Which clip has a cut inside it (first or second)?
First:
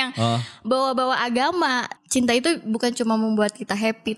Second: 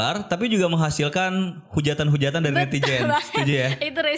first